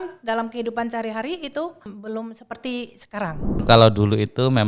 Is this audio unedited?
no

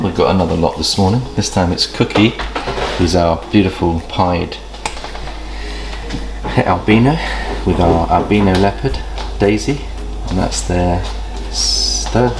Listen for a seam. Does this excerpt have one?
no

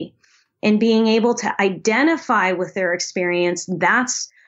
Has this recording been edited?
no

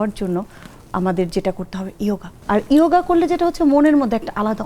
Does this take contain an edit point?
yes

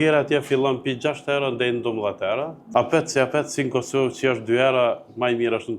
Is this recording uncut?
no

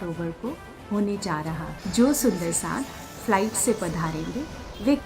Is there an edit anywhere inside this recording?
yes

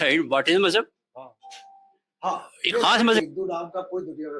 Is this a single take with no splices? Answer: no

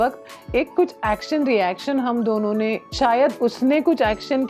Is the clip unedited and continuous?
no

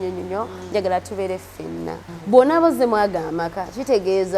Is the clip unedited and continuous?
no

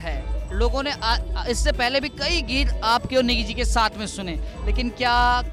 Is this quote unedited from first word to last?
yes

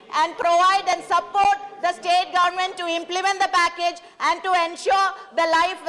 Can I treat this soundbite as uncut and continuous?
yes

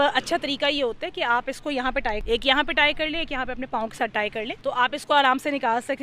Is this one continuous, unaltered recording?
no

